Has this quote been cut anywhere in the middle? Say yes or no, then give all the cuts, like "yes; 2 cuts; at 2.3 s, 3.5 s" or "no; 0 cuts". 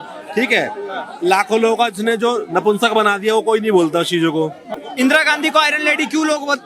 yes; 1 cut; at 4.6 s